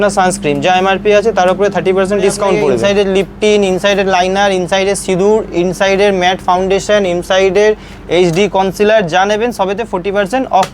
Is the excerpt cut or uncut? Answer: cut